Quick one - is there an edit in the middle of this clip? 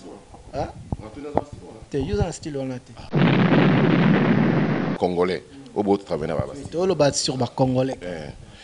yes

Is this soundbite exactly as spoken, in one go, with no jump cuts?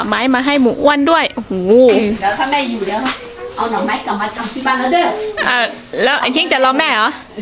no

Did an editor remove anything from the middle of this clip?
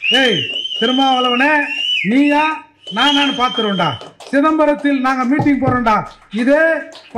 no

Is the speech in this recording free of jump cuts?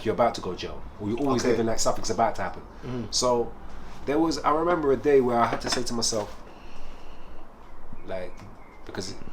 yes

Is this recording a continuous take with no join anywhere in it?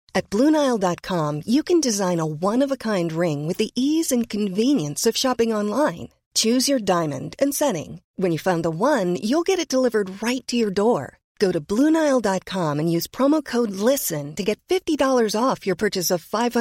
yes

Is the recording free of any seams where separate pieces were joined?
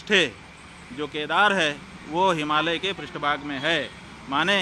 yes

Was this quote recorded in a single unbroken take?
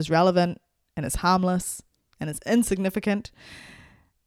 yes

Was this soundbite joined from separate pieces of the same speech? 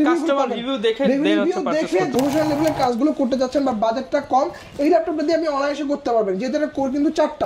yes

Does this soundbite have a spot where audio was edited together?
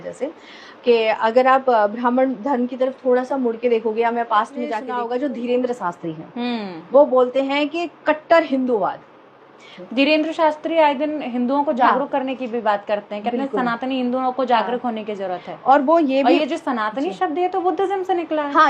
yes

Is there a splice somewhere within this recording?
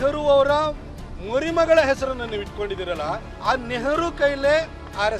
no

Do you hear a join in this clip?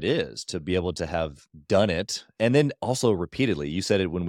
no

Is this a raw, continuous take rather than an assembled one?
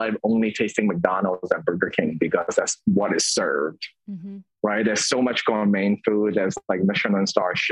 yes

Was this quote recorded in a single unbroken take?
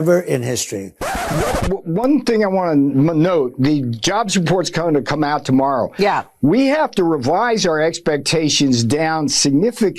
no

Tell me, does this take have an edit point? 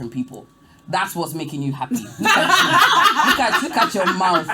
no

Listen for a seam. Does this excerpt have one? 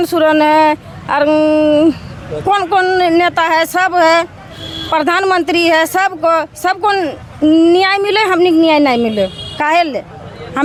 no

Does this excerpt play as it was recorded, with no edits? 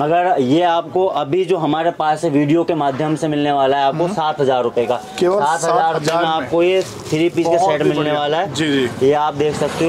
yes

